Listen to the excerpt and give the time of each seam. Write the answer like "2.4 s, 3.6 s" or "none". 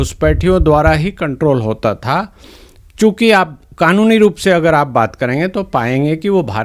none

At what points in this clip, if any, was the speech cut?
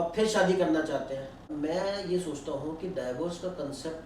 1.4 s

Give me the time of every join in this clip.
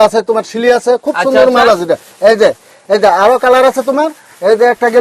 none

